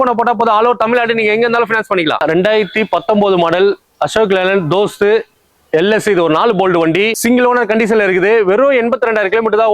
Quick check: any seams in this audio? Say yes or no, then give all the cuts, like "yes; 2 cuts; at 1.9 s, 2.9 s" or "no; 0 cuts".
yes; 2 cuts; at 2.2 s, 7.2 s